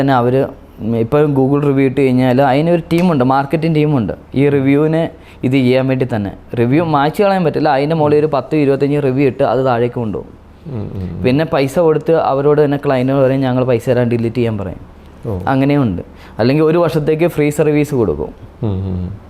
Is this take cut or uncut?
uncut